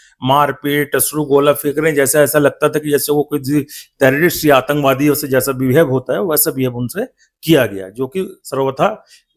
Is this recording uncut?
yes; 0 cuts

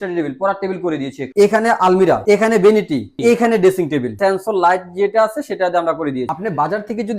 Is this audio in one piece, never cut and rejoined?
no; 5 cuts; at 1.2 s, 2.2 s, 3.1 s, 4.1 s, 6.3 s

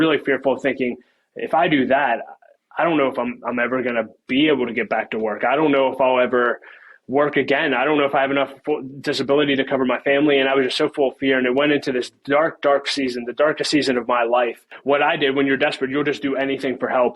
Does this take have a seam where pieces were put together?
yes; 1 cut; at 14.7 s

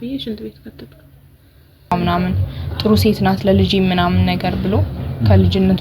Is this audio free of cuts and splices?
no; 1 cut; at 1.9 s

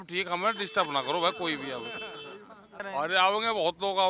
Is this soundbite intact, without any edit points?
no; 1 cut; at 2.8 s

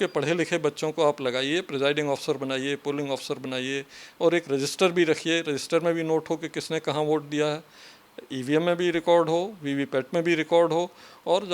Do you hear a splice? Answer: no; 0 cuts

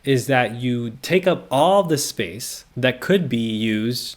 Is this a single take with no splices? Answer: no; 1 cut; at 0.9 s

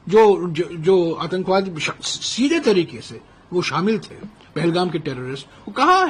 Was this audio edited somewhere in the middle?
no; 0 cuts

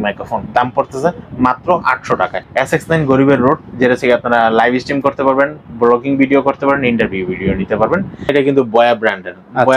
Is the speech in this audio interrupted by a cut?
yes; 2 cuts; at 2.4 s, 8.3 s

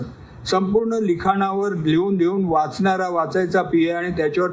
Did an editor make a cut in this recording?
no; 0 cuts

